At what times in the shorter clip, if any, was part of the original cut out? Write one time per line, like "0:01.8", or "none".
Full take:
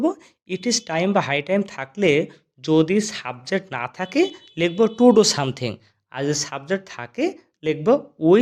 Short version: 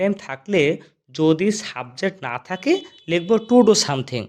none